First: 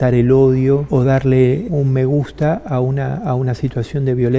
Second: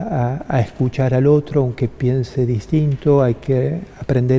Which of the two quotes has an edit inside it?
first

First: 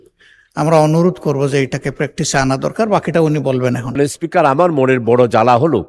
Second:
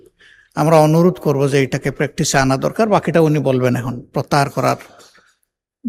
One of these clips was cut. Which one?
first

